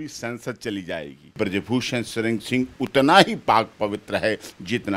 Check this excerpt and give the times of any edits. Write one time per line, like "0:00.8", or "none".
0:01.2